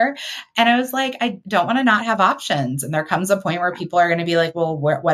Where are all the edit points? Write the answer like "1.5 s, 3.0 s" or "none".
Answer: 1.4 s